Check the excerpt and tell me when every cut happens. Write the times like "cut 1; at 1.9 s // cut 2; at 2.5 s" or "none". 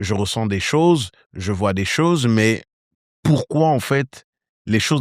none

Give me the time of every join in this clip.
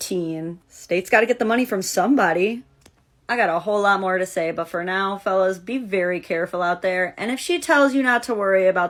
none

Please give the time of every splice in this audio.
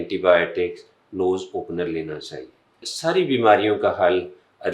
cut 1; at 2.9 s

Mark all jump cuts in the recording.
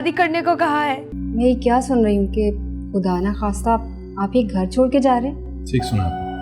cut 1; at 1.1 s

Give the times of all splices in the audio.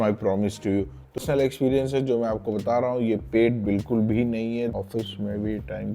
cut 1; at 1.2 s // cut 2; at 4.8 s

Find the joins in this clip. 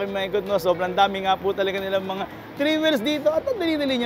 none

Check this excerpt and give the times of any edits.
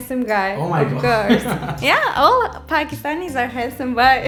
none

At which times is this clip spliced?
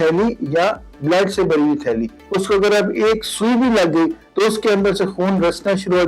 cut 1; at 2.2 s

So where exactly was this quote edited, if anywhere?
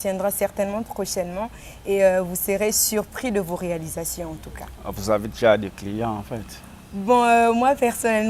none

